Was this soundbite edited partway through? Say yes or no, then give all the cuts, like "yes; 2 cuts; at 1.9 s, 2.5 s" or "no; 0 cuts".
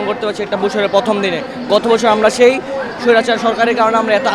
no; 0 cuts